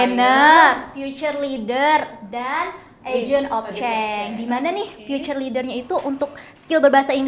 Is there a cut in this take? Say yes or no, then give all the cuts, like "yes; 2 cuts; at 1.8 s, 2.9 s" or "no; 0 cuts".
no; 0 cuts